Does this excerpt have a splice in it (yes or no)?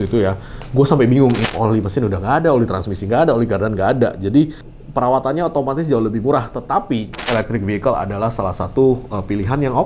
yes